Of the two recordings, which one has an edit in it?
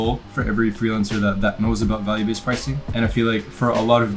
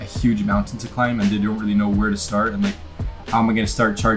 first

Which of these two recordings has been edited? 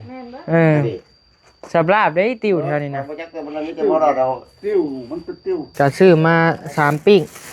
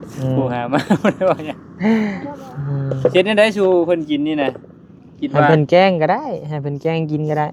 first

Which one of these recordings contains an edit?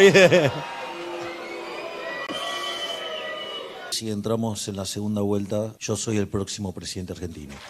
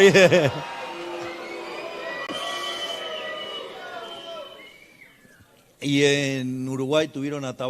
first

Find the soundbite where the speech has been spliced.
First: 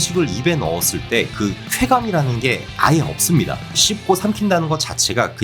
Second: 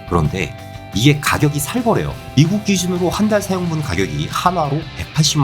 second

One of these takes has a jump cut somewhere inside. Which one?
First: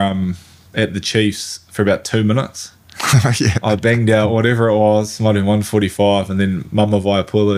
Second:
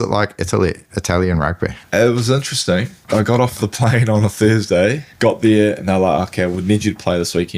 second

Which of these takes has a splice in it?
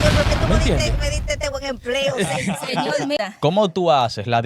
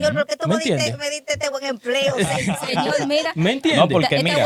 first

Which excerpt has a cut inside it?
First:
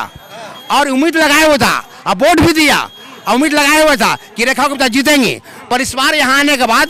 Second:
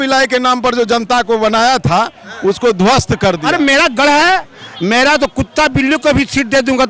second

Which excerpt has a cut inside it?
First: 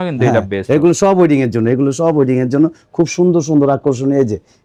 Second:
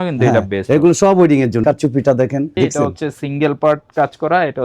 second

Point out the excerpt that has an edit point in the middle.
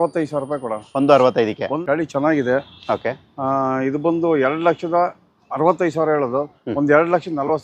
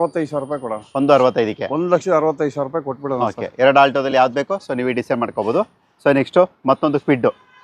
first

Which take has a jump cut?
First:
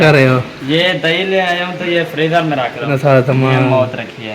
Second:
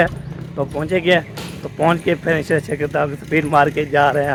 first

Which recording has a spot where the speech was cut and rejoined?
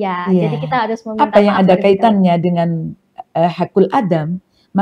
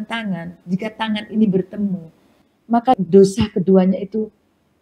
second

